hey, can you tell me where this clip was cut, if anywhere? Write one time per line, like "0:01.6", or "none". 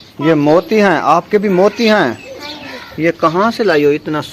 none